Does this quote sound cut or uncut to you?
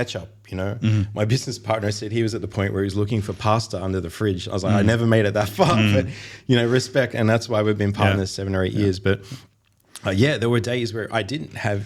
uncut